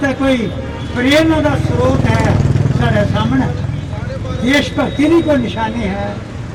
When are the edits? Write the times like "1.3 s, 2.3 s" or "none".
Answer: none